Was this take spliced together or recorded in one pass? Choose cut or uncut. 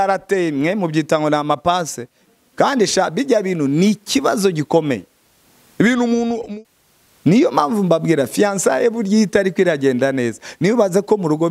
cut